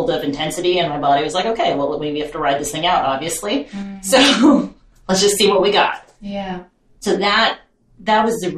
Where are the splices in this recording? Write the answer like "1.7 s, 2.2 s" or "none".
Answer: 7.0 s